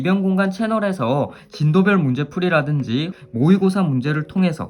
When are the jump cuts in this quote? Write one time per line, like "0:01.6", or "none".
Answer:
0:03.2